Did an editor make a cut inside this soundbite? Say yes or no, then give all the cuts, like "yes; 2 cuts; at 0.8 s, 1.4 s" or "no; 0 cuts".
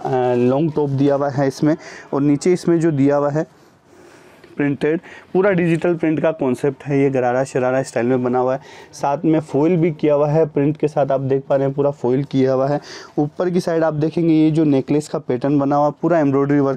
no; 0 cuts